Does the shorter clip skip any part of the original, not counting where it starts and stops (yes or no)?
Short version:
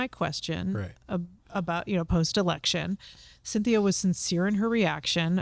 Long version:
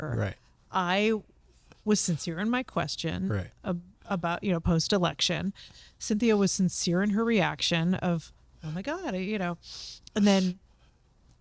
no